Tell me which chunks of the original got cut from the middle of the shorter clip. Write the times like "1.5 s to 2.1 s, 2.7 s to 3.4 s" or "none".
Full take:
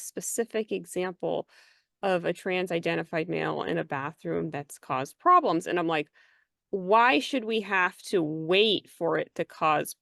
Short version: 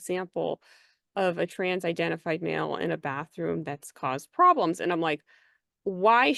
none